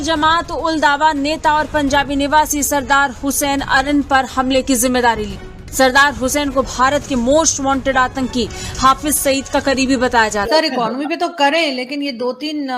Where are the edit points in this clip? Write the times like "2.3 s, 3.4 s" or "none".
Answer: 10.3 s